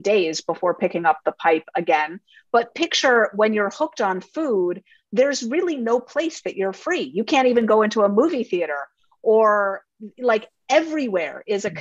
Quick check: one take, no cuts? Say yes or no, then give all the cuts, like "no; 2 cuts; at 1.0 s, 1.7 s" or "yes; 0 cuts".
yes; 0 cuts